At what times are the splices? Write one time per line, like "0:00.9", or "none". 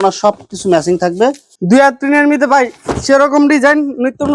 0:01.5